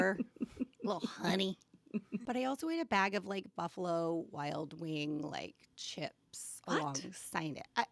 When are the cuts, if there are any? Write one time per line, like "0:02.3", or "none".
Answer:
0:02.2

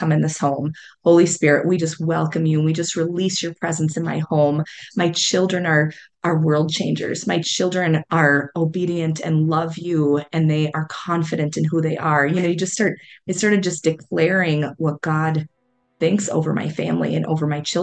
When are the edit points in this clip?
none

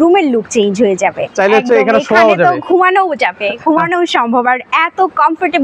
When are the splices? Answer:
0:01.2

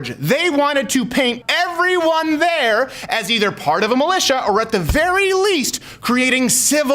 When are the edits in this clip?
0:01.4

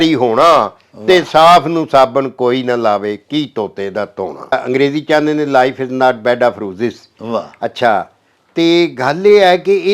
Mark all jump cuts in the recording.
0:04.5

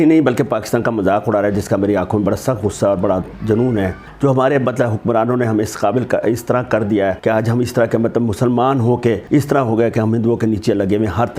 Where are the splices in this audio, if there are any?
0:04.0
0:07.2
0:09.2

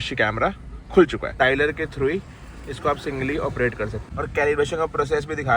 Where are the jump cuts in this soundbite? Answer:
0:01.4
0:04.0

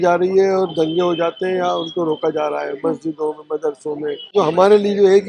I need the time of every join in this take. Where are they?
0:04.3

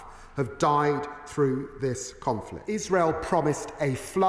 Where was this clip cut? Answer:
0:02.5

